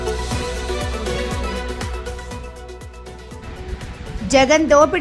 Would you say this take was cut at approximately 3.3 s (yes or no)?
no